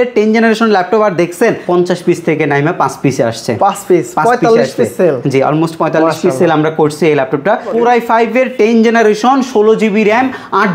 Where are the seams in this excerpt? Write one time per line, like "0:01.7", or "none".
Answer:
0:01.6
0:07.7